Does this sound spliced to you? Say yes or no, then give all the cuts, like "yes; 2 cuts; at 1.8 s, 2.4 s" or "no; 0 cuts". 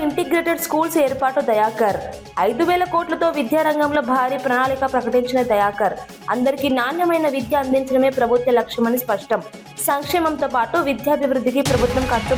no; 0 cuts